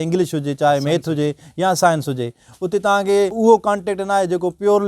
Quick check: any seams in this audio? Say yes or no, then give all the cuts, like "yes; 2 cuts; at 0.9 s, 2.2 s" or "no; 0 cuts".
yes; 1 cut; at 3.3 s